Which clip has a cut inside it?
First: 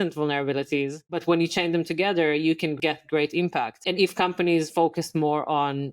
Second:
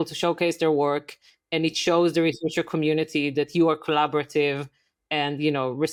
first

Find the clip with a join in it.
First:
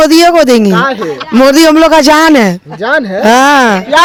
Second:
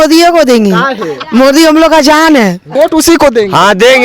second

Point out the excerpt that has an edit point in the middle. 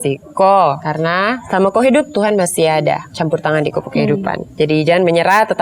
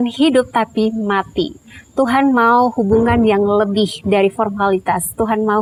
first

